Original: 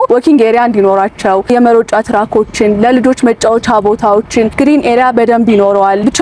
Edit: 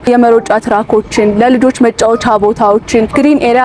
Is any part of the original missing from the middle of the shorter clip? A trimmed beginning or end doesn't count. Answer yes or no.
no